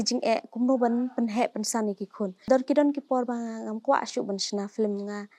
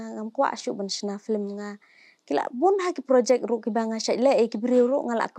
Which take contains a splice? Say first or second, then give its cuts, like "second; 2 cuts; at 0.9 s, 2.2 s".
first; 1 cut; at 2.5 s